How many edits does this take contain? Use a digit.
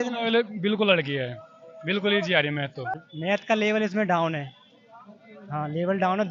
1